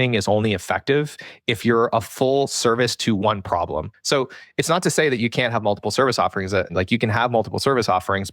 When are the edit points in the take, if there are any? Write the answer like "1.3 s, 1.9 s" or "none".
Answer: 4.0 s, 6.7 s